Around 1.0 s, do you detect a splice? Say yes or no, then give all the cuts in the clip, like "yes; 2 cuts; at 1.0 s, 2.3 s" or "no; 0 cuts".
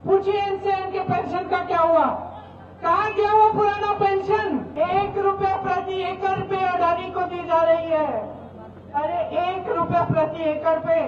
no; 1 cut; at 4.7 s